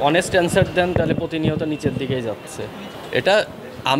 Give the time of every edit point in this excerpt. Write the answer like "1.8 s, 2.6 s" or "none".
2.9 s